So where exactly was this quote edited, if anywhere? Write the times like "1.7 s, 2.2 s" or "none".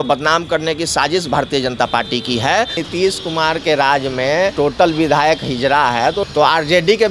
2.8 s, 4.5 s, 6.2 s